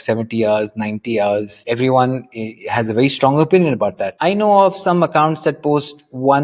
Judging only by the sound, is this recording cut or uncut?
cut